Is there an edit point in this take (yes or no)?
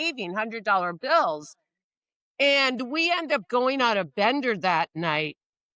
no